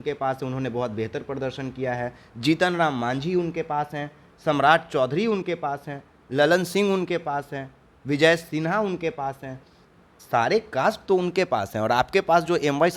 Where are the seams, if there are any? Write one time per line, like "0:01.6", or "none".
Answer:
none